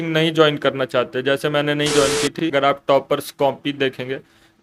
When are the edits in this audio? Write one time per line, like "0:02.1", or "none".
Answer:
0:02.3